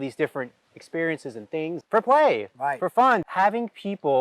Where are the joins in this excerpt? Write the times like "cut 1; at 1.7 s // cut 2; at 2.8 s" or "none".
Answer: cut 1; at 1.8 s // cut 2; at 3.3 s